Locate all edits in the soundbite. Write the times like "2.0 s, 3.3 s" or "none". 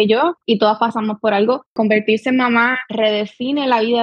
1.7 s